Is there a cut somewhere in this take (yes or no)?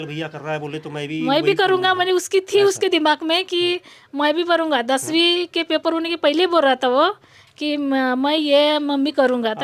no